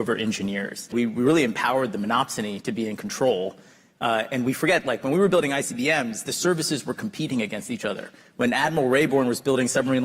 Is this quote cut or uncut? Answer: cut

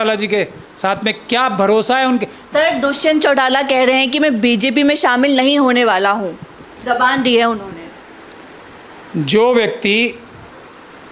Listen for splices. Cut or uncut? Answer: uncut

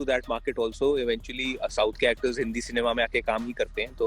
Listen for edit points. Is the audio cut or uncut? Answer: uncut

